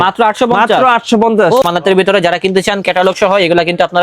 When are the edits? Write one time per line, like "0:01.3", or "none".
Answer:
0:01.6